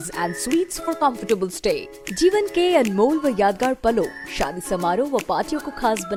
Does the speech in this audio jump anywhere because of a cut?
no; 0 cuts

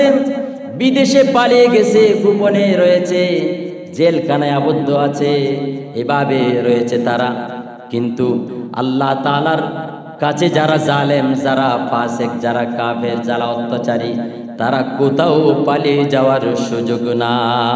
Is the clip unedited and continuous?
yes; 0 cuts

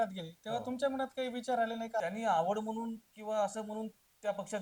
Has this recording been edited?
yes; 1 cut; at 2.0 s

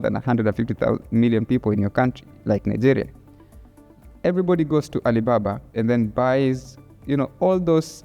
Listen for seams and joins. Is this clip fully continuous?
no; 1 cut; at 6.9 s

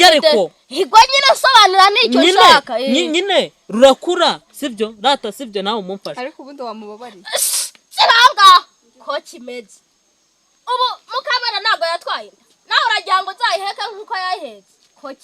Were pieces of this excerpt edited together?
no; 0 cuts

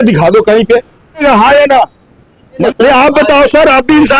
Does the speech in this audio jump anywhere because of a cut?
yes; 2 cuts; at 1.2 s, 2.6 s

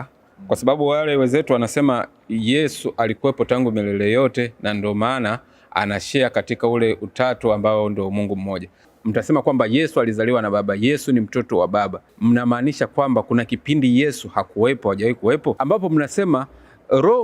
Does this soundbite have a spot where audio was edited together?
yes; 3 cuts; at 8.9 s, 12.1 s, 15.6 s

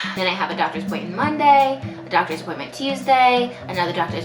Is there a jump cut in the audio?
no; 0 cuts

